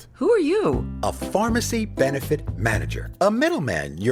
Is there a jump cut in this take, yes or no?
no